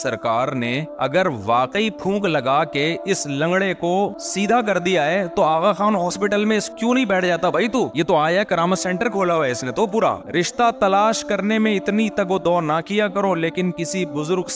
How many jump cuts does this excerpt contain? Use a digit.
2